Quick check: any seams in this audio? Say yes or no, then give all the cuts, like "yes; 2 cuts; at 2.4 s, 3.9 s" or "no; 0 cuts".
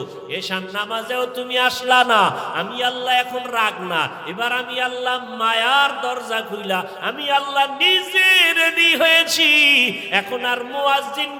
no; 0 cuts